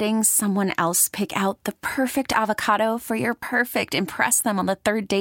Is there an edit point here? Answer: no; 0 cuts

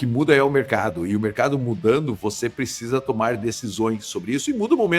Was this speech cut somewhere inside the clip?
no; 0 cuts

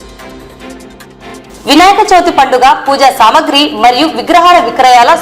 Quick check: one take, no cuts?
no; 1 cut; at 1.5 s

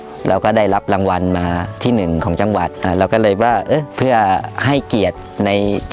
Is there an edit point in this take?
yes; 4 cuts; at 1.8 s, 2.8 s, 3.9 s, 4.5 s

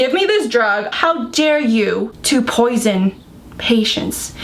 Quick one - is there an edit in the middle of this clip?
yes; 2 cuts; at 0.9 s, 2.2 s

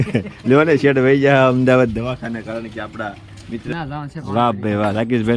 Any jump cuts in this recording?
yes; 1 cut; at 3.7 s

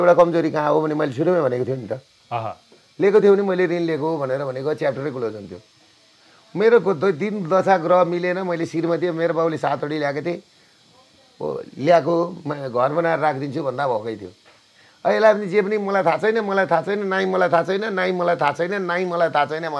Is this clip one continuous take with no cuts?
yes; 0 cuts

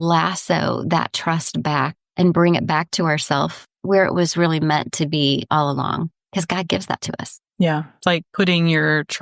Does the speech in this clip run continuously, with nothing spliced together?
yes; 0 cuts

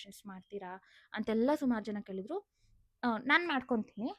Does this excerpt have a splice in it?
no; 0 cuts

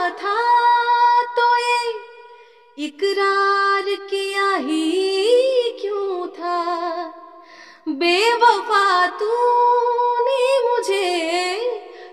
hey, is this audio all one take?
yes; 0 cuts

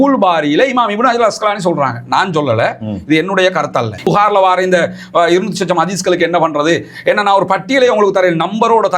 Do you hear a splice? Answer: yes; 1 cut; at 4.1 s

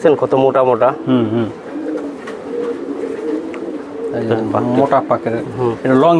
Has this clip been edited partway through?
no; 0 cuts

